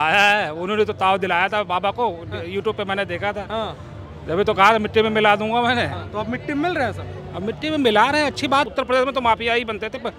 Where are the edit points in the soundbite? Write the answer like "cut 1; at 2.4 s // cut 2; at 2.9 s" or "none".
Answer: cut 1; at 8.7 s